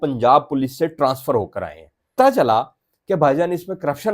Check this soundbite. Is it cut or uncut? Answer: cut